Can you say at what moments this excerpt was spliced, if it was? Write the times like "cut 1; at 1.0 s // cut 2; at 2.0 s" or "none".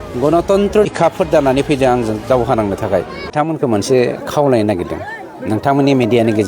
cut 1; at 0.9 s // cut 2; at 3.3 s